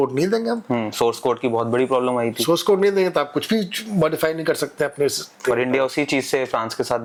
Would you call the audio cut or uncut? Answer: uncut